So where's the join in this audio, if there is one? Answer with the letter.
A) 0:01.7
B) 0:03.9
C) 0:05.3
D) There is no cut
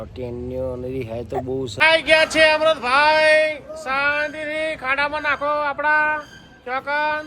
A